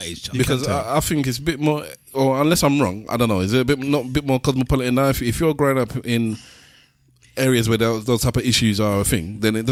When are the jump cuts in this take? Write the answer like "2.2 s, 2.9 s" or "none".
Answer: none

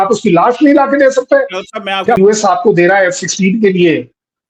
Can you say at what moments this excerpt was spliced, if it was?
2.2 s

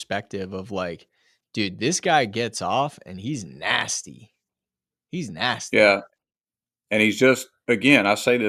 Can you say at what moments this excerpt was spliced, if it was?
none

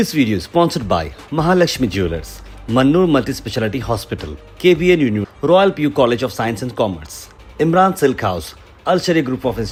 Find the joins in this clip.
none

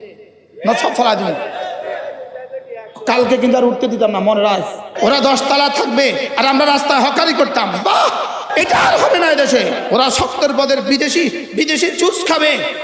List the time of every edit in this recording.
4.9 s, 8.5 s, 9.8 s

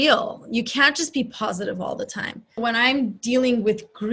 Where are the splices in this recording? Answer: 2.6 s

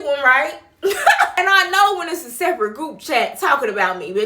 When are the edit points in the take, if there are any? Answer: 1.3 s

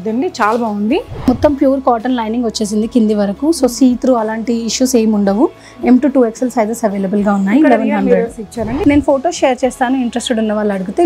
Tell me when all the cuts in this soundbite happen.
1.3 s, 8.8 s

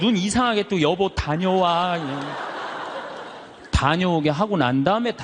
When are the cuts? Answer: none

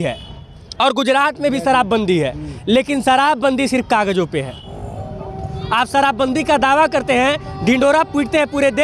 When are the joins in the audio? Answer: 4.7 s

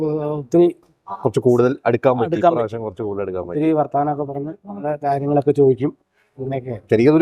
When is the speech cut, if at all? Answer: none

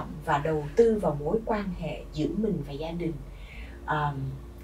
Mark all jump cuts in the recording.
none

